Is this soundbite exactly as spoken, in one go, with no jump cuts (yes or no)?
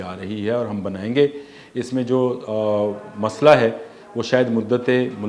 yes